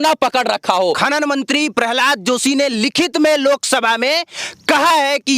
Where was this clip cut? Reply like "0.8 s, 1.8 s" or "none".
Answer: 1.0 s